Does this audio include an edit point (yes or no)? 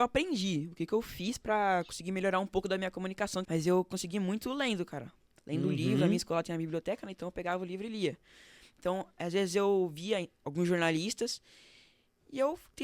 yes